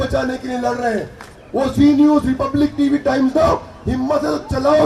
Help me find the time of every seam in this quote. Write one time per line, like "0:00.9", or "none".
0:01.2